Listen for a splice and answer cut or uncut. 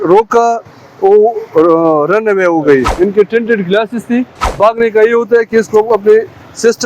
cut